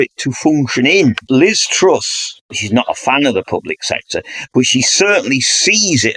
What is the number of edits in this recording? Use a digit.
2